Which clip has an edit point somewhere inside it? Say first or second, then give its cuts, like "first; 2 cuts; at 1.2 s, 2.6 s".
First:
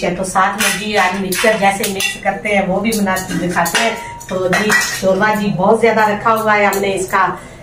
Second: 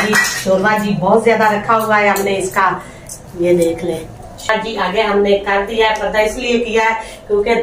second; 1 cut; at 4.5 s